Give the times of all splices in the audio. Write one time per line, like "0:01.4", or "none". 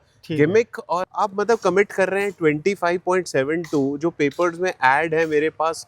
0:01.1